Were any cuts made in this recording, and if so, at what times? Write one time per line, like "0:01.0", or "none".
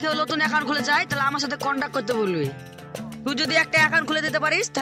none